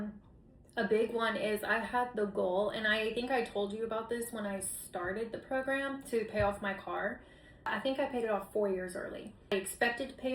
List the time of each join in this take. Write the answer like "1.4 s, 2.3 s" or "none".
7.7 s, 9.5 s